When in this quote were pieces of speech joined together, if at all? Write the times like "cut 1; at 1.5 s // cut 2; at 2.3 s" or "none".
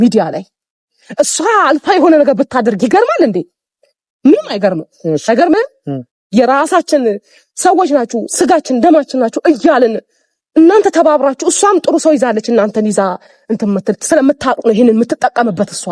none